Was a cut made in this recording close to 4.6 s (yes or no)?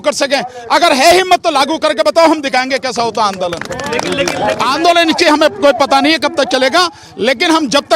yes